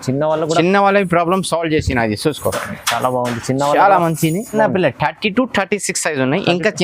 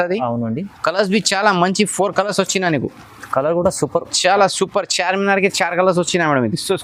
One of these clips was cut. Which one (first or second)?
first